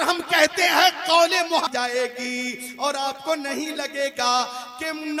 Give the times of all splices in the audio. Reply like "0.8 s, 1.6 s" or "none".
1.7 s